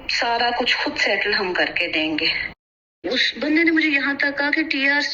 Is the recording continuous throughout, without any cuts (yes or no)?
no